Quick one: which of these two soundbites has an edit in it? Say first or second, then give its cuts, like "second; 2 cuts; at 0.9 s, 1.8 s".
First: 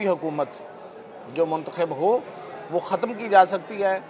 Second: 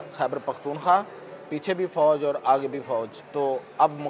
second; 1 cut; at 3.2 s